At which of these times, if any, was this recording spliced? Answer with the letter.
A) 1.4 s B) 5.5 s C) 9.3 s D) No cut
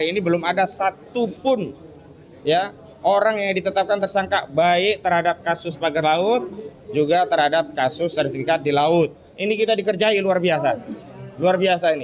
C